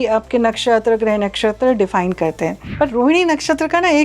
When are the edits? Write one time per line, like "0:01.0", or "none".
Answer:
0:02.6